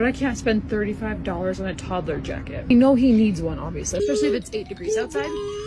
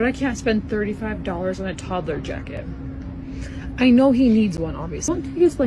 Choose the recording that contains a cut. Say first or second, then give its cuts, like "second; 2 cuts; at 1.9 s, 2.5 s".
first; 2 cuts; at 2.7 s, 3.7 s